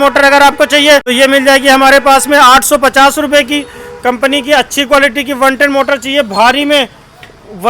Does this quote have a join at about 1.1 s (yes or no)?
yes